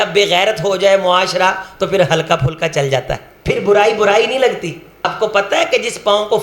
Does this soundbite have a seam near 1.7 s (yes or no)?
no